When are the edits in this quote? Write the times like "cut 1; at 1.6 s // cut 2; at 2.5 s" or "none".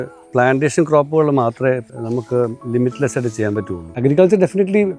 cut 1; at 1.9 s // cut 2; at 3.8 s